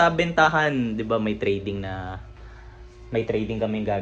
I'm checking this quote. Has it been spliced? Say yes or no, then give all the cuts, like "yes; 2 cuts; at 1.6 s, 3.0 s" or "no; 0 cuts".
no; 0 cuts